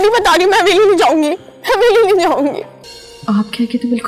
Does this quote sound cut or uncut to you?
cut